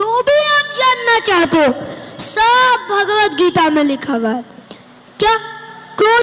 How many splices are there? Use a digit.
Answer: 0